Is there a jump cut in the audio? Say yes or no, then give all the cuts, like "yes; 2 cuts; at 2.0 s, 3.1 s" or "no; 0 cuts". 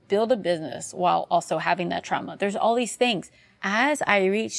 yes; 1 cut; at 3.6 s